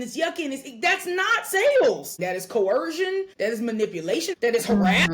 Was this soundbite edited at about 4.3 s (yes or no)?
yes